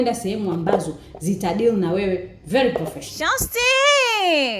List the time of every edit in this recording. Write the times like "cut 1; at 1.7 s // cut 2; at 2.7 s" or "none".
cut 1; at 3.4 s